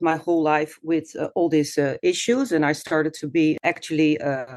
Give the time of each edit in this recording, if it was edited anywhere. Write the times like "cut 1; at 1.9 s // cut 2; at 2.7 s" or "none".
cut 1; at 3.6 s